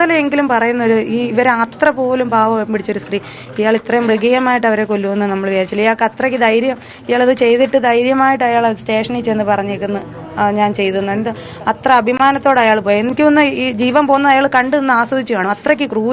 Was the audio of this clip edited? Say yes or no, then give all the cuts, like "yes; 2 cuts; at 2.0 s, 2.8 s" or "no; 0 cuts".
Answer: no; 0 cuts